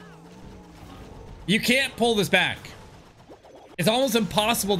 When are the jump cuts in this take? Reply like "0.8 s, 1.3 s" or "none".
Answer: none